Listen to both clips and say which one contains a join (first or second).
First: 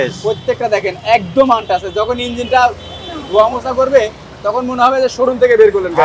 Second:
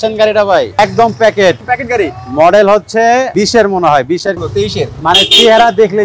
second